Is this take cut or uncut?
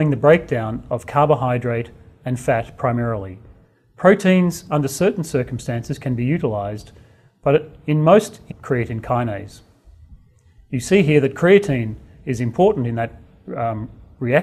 uncut